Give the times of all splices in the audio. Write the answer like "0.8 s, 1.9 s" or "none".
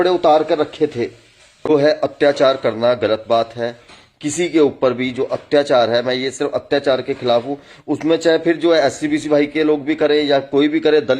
1.7 s